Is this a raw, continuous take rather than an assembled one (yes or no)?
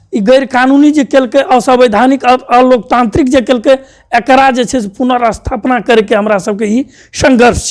yes